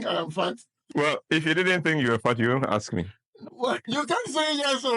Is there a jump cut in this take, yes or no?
yes